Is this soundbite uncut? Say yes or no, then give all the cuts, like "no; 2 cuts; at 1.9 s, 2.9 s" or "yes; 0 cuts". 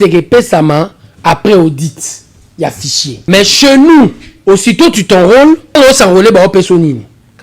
no; 3 cuts; at 3.2 s, 4.3 s, 5.8 s